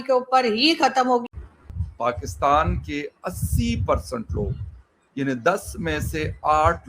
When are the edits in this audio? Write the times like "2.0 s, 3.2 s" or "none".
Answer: 1.2 s